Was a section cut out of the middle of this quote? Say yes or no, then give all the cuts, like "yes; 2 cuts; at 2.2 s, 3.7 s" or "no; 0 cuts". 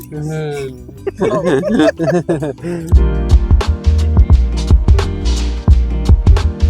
yes; 1 cut; at 2.9 s